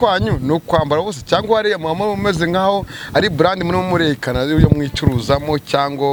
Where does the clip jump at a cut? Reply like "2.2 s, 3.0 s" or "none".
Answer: none

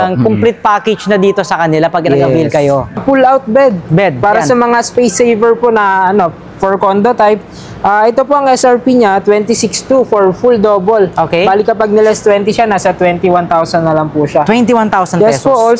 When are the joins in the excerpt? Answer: 3.0 s

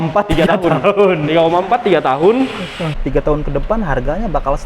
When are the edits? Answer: 2.9 s

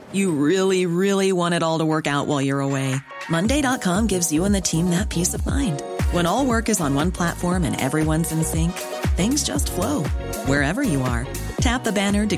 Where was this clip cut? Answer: none

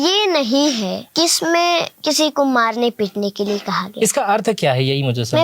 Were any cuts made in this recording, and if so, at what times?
1.0 s, 1.9 s

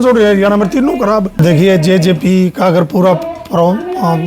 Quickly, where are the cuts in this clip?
1.4 s

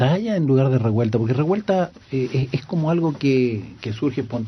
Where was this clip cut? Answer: 2.0 s

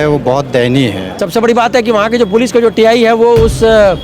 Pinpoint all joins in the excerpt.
1.1 s

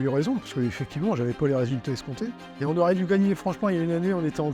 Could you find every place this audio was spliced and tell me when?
2.4 s

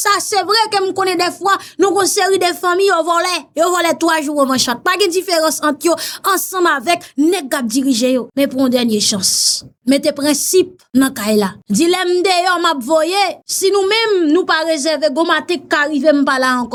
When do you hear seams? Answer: none

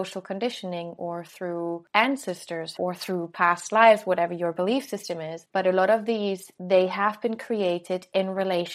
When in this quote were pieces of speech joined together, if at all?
2.8 s, 5.4 s, 6.5 s

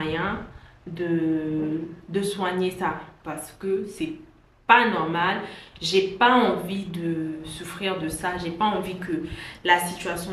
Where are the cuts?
none

